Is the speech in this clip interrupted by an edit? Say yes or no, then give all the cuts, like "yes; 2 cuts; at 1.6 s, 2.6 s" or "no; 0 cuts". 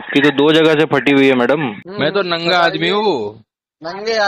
yes; 1 cut; at 1.8 s